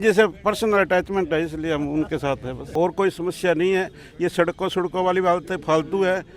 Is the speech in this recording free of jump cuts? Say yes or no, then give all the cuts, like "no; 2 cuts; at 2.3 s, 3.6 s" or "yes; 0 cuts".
no; 1 cut; at 2.6 s